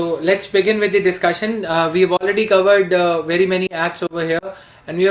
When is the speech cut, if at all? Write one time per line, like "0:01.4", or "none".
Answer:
none